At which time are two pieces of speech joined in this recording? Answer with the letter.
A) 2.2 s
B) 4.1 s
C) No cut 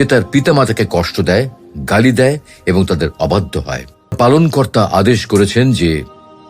B